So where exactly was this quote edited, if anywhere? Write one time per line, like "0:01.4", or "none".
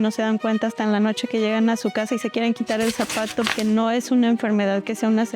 0:03.5